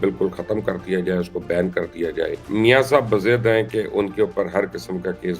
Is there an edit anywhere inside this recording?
yes; 1 cut; at 2.4 s

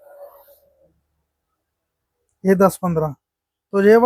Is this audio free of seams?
yes; 0 cuts

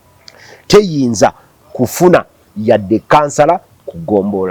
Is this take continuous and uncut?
yes; 0 cuts

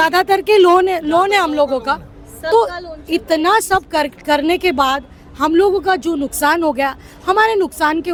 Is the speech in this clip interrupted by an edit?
no; 0 cuts

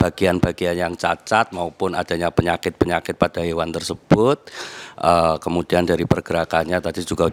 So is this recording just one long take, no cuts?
yes; 0 cuts

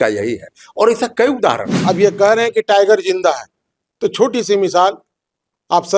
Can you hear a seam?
yes; 1 cut; at 1.7 s

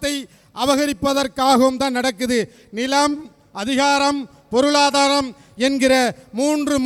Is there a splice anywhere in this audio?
no; 0 cuts

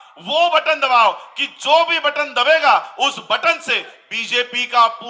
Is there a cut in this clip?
no; 0 cuts

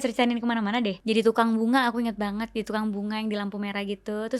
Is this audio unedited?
no; 1 cut; at 1.0 s

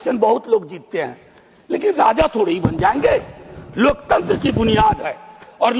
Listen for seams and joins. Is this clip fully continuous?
yes; 0 cuts

